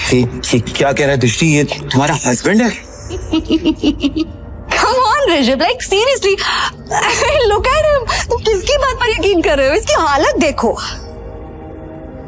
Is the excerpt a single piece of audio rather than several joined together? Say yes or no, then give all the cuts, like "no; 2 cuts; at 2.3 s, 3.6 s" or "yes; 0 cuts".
no; 1 cut; at 3.2 s